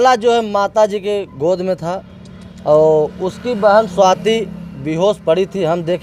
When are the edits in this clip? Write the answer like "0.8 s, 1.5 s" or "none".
none